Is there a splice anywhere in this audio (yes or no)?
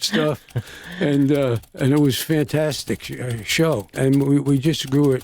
yes